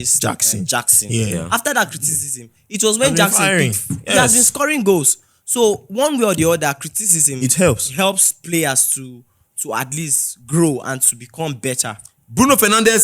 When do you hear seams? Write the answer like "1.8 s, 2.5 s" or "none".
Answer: 12.1 s